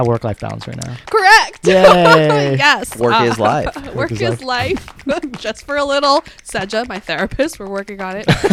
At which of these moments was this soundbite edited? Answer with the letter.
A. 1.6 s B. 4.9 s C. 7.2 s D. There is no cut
D